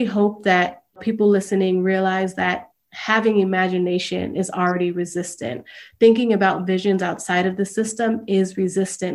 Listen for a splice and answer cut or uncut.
cut